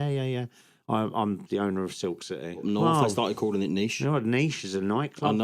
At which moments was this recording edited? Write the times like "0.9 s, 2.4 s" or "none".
2.6 s

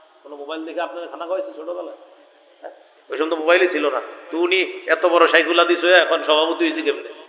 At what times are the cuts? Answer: none

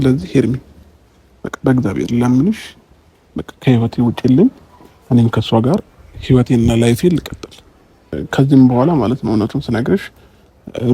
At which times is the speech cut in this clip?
8.2 s

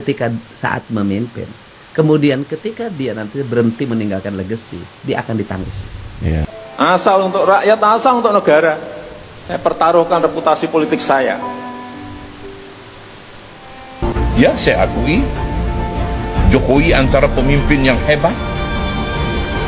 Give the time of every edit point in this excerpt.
none

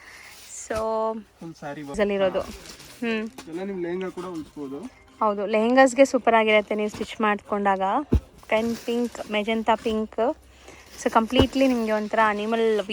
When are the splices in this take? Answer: 2.0 s, 8.3 s

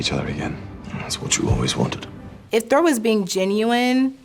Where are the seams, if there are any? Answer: 2.3 s

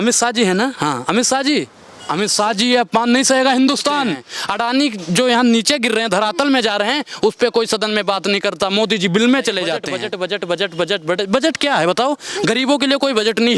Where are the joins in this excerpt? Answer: 4.3 s, 9.9 s

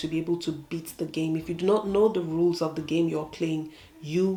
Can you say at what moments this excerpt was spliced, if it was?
none

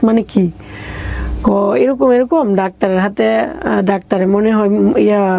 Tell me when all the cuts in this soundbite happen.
none

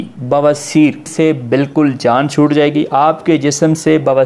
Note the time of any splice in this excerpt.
1.1 s

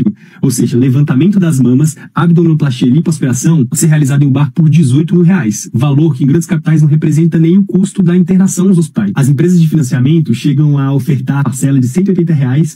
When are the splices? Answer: none

